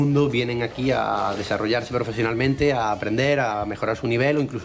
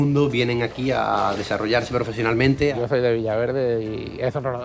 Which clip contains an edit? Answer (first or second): second